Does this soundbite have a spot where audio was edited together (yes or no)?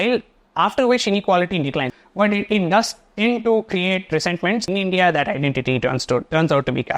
yes